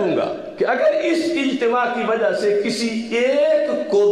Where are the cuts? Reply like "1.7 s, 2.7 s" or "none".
none